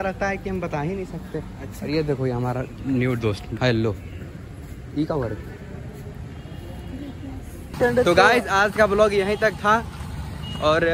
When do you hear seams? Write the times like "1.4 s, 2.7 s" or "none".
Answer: none